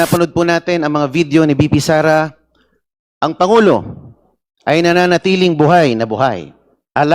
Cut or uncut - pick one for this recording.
uncut